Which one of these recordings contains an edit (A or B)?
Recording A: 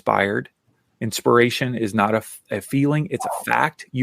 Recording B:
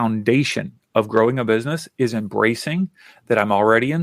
A